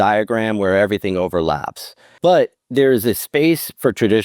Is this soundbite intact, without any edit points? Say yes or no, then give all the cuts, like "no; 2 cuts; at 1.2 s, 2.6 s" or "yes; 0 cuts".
no; 1 cut; at 2.1 s